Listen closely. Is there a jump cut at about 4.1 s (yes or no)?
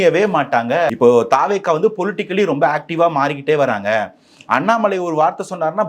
no